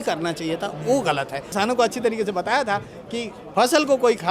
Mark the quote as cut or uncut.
cut